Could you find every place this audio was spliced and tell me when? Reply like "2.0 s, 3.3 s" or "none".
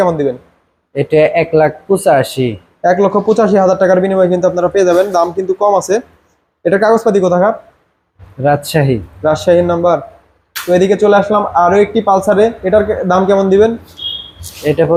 none